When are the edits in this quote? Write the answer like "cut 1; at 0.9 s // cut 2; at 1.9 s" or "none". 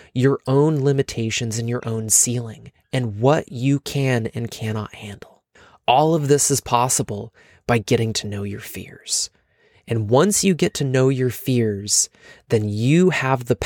none